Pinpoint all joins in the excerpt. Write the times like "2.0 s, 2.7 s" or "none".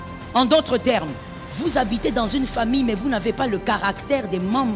none